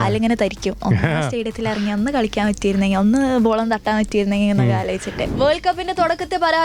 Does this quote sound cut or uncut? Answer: cut